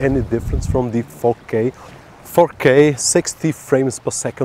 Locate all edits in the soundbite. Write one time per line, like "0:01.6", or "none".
0:02.1